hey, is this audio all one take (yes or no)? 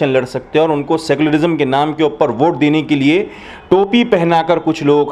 yes